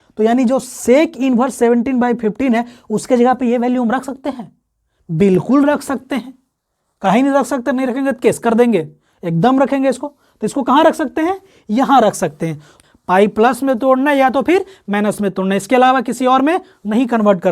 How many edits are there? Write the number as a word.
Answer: one